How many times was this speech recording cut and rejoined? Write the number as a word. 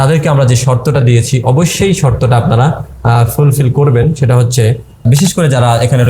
one